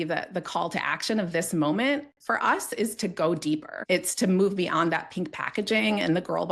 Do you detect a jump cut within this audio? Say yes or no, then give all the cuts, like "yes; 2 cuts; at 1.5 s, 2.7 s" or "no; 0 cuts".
yes; 1 cut; at 3.7 s